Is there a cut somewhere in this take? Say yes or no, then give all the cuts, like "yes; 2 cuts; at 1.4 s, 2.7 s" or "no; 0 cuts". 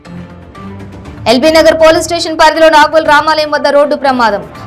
no; 0 cuts